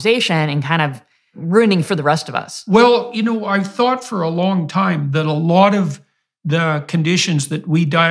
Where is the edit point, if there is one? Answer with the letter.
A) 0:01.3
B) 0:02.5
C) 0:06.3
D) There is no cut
A